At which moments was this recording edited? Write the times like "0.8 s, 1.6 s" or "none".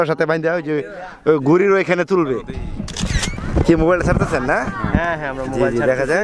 3.0 s